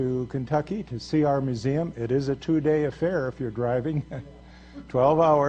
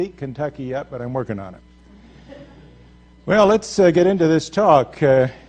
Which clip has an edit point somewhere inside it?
second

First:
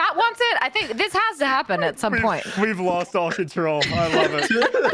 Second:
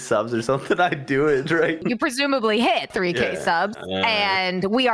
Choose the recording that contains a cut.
second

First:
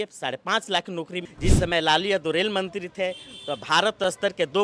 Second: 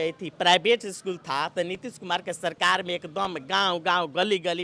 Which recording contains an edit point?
first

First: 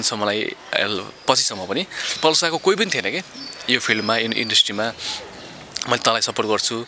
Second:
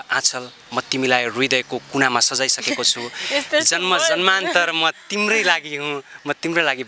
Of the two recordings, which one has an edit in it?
first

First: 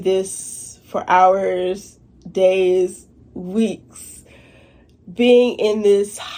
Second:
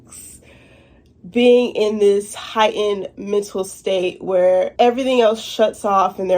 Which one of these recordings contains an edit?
second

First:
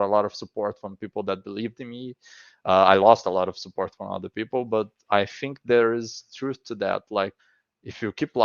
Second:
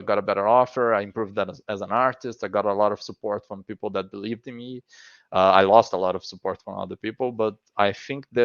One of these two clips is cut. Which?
first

